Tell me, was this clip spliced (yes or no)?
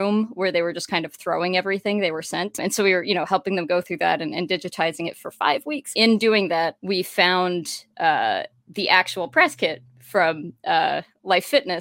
yes